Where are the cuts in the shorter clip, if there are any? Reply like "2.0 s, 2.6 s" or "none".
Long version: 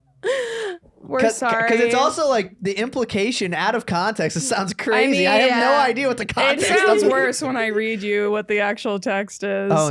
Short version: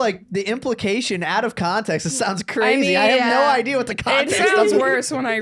none